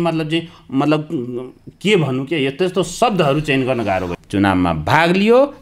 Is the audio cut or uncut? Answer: cut